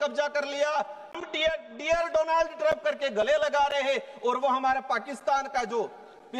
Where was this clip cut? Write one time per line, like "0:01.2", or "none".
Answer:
0:01.2